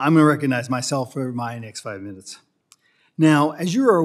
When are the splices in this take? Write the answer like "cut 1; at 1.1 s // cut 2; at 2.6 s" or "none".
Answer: none

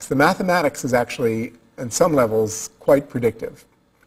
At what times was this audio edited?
cut 1; at 2.7 s

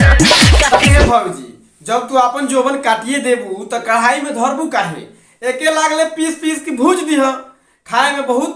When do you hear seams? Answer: cut 1; at 0.9 s

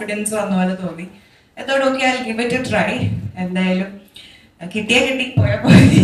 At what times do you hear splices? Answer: none

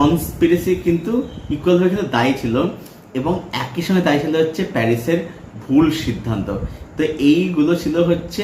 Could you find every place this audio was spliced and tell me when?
none

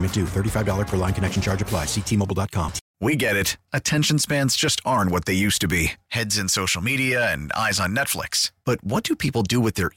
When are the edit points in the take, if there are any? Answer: cut 1; at 2.8 s

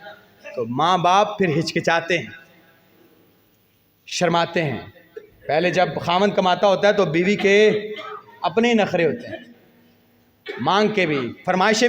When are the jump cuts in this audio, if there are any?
none

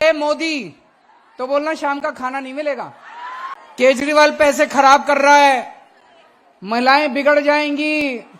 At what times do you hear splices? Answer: cut 1; at 3.5 s

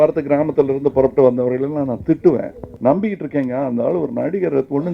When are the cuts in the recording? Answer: cut 1; at 2.6 s

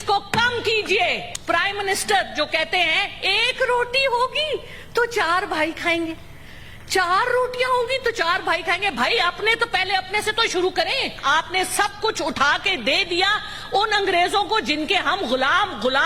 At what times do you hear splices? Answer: cut 1; at 1.3 s // cut 2; at 11.2 s

